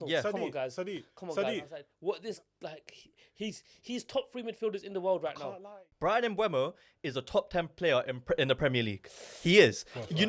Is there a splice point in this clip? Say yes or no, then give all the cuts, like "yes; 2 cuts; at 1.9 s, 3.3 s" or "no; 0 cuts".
yes; 2 cuts; at 1.8 s, 5.8 s